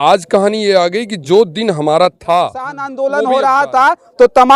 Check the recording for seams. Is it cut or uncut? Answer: cut